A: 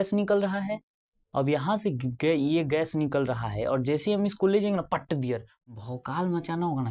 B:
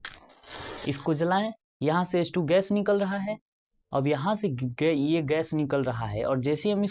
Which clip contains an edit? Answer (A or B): A